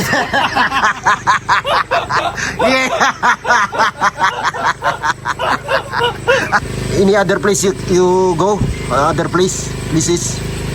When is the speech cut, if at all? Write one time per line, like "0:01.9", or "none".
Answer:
0:06.6